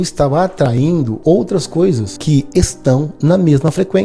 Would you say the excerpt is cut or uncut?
cut